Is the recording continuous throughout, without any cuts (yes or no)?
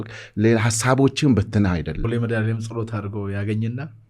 no